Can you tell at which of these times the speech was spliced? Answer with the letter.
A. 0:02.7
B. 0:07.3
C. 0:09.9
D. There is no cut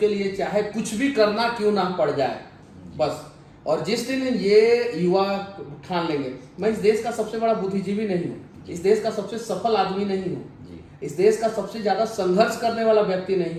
D